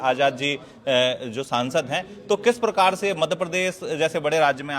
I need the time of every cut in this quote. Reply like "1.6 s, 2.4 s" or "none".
none